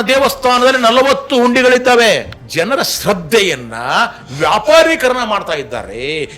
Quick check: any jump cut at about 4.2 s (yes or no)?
no